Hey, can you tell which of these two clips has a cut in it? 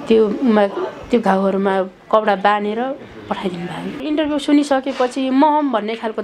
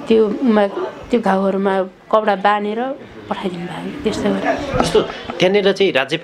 first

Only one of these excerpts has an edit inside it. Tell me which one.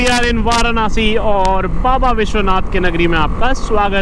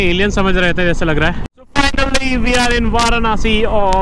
second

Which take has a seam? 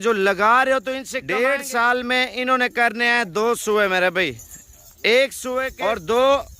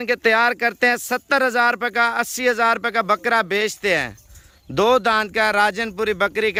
first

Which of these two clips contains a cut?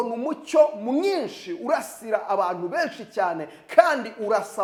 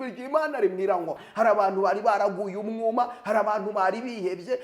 second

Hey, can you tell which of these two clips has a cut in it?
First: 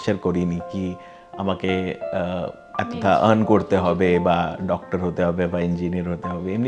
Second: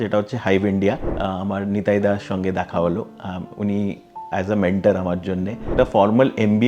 second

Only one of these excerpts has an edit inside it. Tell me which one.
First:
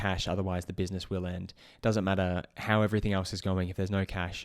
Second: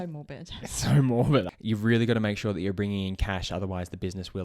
second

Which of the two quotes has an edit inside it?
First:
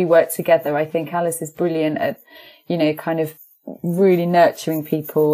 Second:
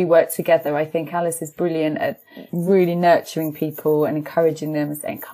second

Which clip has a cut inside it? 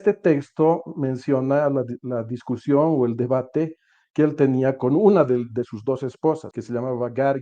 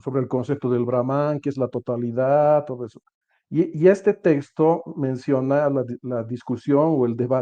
first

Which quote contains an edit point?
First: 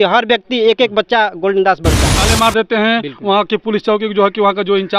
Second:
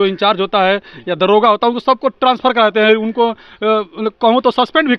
first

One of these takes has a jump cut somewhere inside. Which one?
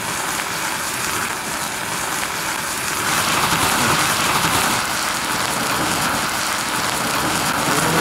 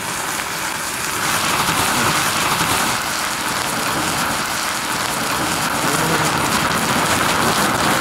second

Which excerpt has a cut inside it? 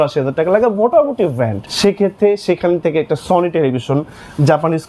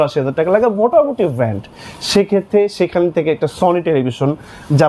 first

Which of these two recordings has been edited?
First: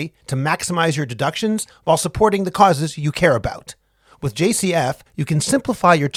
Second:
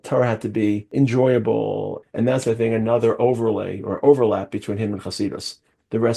second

